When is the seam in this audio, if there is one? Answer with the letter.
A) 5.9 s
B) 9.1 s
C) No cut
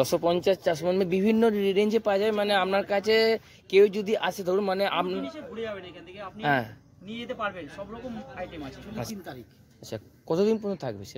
B